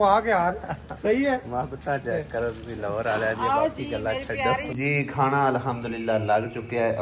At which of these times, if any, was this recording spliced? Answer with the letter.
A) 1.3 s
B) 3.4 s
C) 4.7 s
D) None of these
C